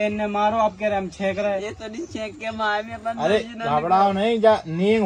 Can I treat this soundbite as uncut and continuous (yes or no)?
yes